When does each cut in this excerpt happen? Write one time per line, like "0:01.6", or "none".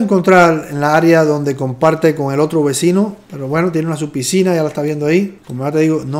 none

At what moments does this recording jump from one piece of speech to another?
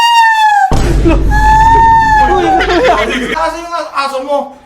0:03.3

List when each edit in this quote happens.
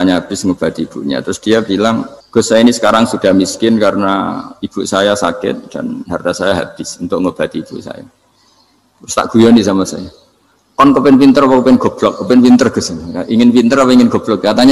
0:02.2

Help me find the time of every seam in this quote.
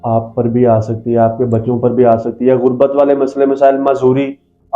none

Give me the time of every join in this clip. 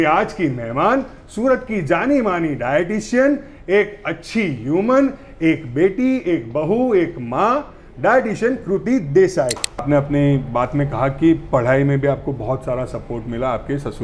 0:09.8

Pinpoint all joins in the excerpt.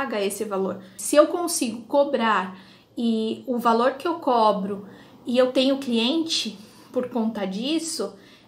0:00.9

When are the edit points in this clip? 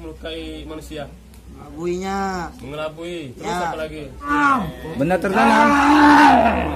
0:04.3

